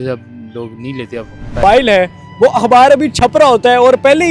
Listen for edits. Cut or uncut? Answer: cut